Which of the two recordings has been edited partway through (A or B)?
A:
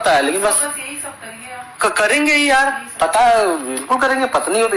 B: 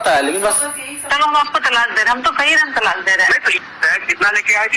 B